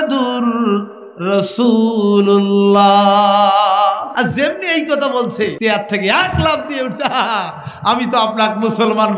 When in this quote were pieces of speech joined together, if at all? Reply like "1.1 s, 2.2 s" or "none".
4.1 s, 5.6 s